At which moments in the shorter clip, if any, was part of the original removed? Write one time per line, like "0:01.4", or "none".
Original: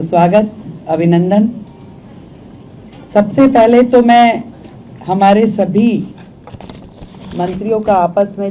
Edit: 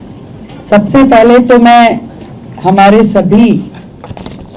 none